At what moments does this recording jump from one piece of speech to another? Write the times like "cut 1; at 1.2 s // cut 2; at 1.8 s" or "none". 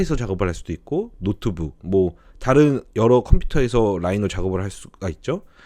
none